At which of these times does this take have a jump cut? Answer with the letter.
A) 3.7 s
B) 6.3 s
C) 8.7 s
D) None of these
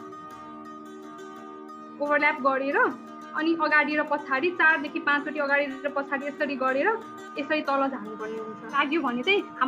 C